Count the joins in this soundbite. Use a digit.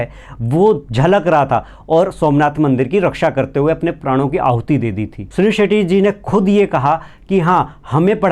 2